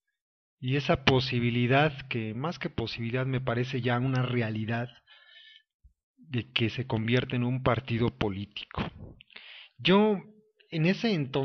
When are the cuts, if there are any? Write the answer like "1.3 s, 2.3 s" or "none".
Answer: none